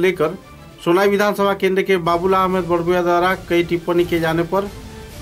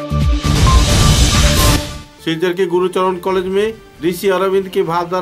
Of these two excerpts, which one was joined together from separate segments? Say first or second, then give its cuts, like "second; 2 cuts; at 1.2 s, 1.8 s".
second; 1 cut; at 1.7 s